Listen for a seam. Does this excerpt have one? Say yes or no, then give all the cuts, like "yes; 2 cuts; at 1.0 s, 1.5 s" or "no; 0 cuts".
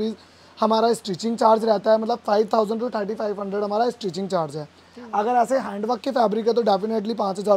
no; 0 cuts